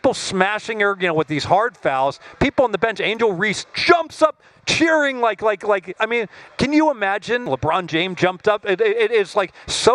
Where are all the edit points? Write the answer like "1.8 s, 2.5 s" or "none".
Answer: 7.5 s